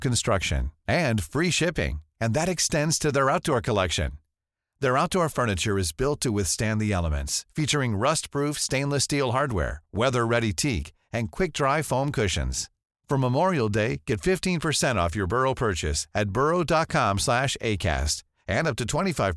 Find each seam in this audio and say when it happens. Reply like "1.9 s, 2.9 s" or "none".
none